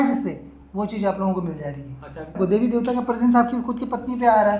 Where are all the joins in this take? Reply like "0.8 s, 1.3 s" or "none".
2.4 s